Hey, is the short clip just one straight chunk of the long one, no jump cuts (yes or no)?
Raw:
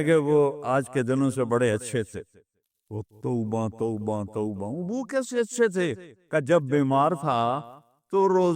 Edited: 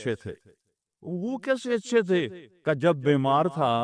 no